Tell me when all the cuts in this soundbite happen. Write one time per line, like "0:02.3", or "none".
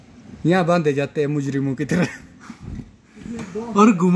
none